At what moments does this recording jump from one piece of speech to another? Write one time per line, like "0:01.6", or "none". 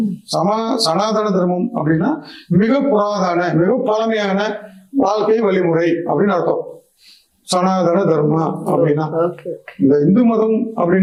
none